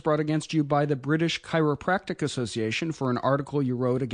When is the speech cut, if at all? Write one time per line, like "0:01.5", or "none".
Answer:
0:02.3